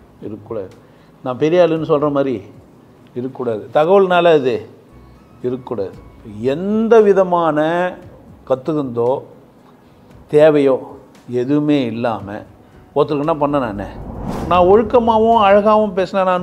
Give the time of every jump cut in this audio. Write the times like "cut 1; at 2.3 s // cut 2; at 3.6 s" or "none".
cut 1; at 14.3 s

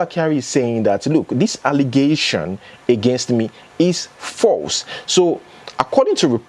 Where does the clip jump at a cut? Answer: none

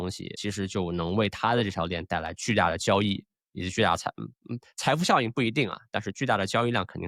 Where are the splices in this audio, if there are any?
none

